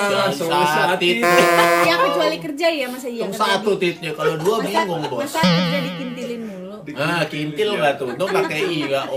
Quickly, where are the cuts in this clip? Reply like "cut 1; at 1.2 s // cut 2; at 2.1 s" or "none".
none